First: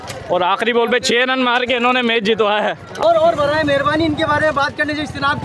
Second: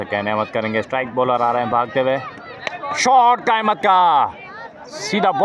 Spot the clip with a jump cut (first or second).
first